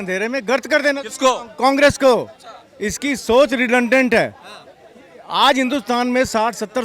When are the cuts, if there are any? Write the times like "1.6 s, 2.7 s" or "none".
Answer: none